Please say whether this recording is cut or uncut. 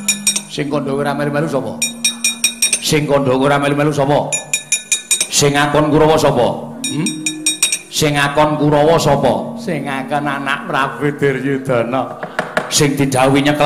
cut